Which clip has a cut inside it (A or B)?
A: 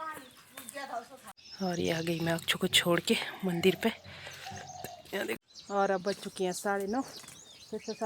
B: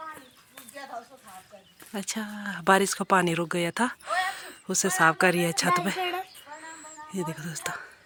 A